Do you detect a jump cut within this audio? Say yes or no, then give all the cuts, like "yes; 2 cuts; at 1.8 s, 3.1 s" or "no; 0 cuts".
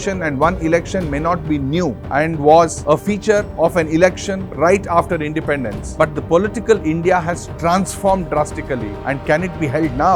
no; 0 cuts